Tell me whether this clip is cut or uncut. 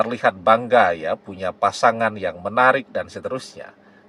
uncut